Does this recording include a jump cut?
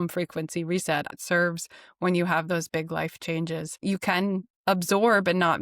yes; 2 cuts; at 1.1 s, 3.8 s

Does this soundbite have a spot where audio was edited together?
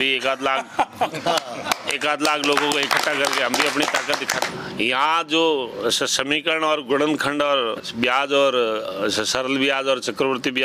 yes; 2 cuts; at 4.5 s, 7.9 s

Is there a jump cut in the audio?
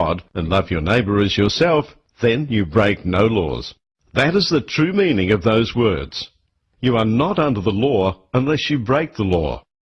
no; 0 cuts

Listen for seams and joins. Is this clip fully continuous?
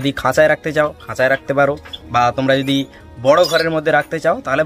yes; 0 cuts

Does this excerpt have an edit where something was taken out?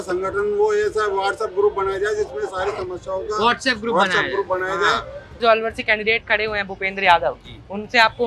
yes; 1 cut; at 5.4 s

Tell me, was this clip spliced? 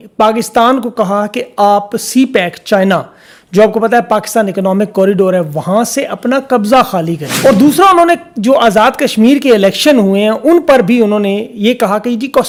no; 0 cuts

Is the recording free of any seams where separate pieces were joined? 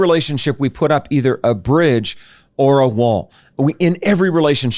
yes; 0 cuts

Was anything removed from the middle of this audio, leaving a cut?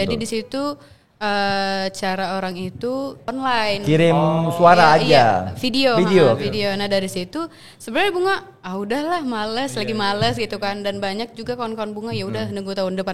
yes; 1 cut; at 3.2 s

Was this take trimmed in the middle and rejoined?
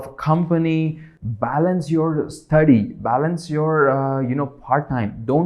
yes; 1 cut; at 1.1 s

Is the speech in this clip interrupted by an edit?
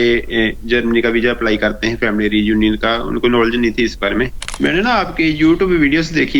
yes; 1 cut; at 4.4 s

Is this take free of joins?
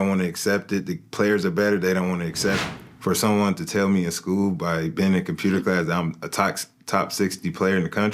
no; 1 cut; at 2.6 s

